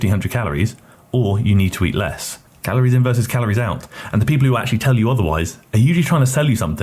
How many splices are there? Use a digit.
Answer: 1